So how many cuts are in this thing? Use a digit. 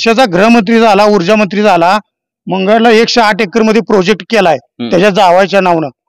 0